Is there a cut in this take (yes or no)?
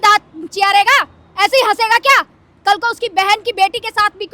no